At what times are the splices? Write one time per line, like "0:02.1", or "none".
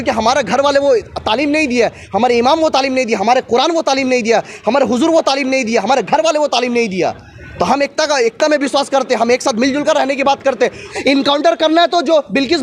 0:10.8